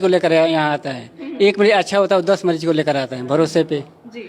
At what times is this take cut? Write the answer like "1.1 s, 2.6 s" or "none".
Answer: none